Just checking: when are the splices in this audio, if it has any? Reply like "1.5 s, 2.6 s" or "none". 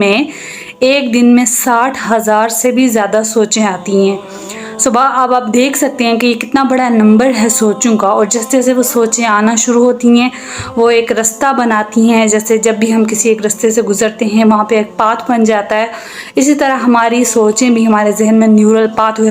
none

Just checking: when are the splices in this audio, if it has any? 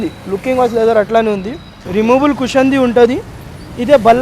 1.7 s

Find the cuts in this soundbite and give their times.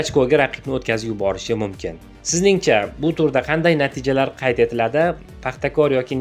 2.1 s

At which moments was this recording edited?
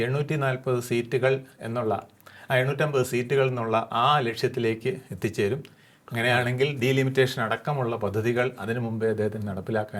none

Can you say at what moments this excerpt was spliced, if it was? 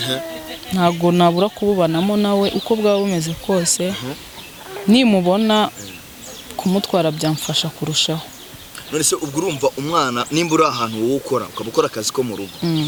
none

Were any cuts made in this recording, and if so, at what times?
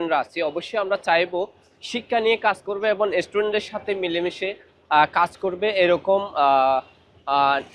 none

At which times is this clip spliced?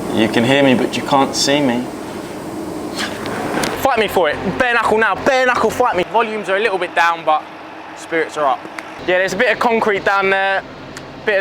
3.7 s, 6.1 s, 8.9 s

